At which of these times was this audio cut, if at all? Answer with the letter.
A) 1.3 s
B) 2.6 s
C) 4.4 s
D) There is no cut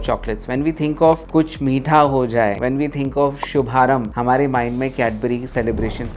D